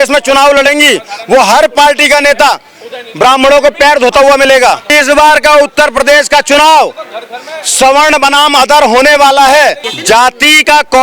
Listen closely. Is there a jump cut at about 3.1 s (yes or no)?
no